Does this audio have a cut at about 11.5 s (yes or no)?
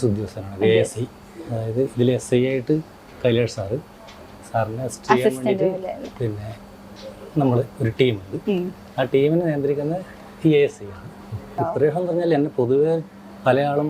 yes